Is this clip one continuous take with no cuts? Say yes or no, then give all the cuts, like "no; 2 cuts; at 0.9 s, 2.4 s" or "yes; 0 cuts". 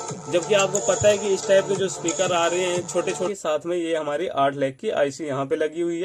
no; 1 cut; at 3.3 s